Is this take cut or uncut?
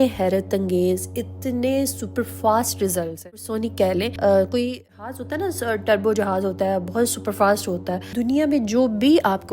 cut